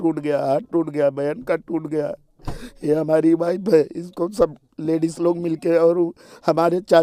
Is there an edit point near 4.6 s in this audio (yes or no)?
no